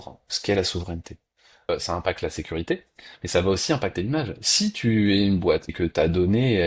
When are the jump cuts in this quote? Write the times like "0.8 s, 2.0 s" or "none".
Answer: 1.7 s, 5.7 s